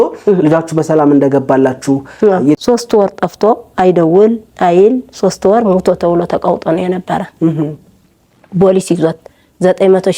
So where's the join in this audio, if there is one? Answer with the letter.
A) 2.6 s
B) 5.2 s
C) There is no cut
A